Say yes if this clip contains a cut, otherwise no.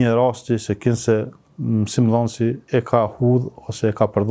yes